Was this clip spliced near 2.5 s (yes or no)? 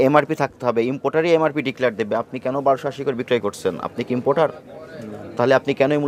no